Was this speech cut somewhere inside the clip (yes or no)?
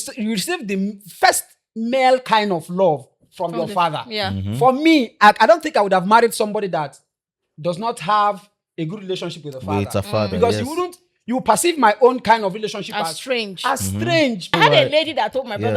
yes